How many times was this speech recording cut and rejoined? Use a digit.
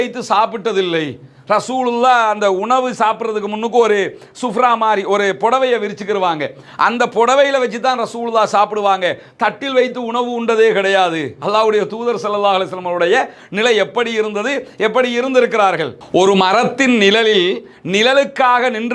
1